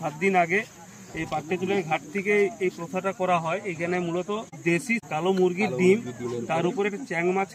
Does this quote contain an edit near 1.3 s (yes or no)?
no